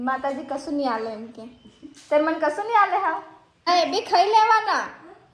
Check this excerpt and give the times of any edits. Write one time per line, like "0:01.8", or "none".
0:03.7